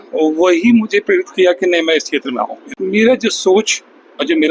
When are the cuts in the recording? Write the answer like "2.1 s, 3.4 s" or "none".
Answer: 2.6 s